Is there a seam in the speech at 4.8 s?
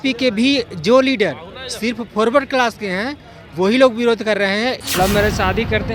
yes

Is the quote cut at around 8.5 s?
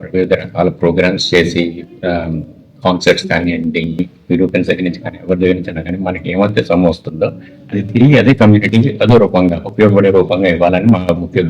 no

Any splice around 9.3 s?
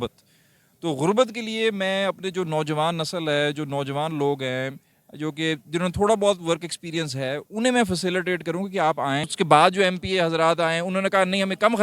yes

